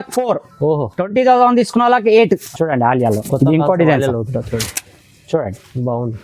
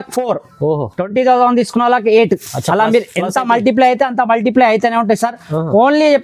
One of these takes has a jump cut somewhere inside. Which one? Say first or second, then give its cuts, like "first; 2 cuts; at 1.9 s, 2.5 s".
first; 1 cut; at 2.5 s